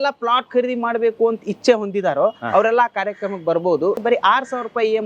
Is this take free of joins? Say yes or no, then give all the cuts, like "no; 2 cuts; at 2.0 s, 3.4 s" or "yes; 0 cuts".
no; 1 cut; at 4.0 s